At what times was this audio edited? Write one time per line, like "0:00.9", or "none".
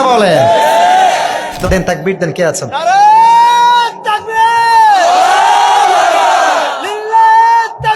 0:01.5